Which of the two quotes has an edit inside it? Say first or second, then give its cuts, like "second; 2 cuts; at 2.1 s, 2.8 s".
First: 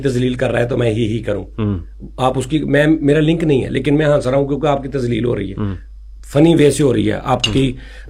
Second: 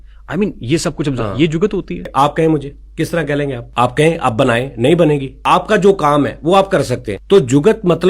second; 4 cuts; at 2.0 s, 3.6 s, 5.3 s, 7.1 s